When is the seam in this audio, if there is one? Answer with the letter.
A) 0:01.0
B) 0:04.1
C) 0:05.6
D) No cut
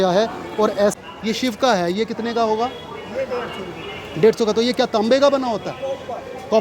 A